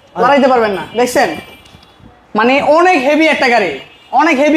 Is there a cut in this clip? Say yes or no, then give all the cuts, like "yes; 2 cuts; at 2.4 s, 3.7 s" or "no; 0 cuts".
no; 0 cuts